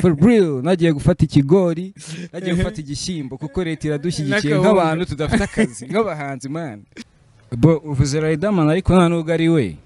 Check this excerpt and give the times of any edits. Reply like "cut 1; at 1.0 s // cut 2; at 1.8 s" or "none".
cut 1; at 6.9 s